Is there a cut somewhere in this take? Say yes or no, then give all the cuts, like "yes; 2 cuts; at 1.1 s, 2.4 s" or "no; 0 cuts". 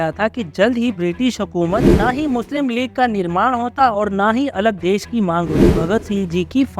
yes; 2 cuts; at 2.0 s, 5.7 s